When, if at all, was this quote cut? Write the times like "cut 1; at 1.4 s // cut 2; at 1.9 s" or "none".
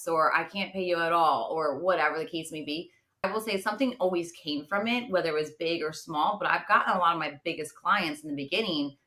cut 1; at 3.2 s